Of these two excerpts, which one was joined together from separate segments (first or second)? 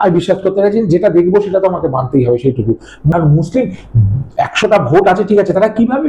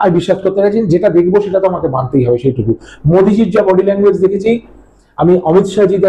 first